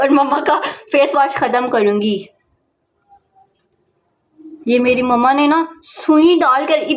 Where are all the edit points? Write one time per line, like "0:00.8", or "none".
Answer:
none